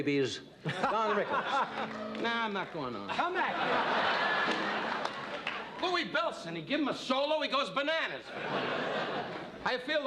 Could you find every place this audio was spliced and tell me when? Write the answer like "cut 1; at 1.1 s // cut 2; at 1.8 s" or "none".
cut 1; at 3.9 s

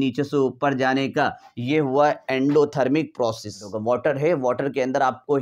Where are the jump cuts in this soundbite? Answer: cut 1; at 3.7 s

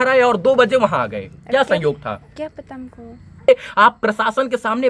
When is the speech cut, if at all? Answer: cut 1; at 3.5 s

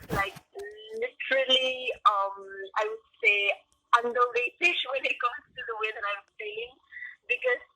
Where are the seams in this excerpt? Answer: none

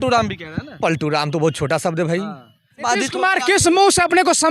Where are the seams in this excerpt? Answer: cut 1; at 2.8 s

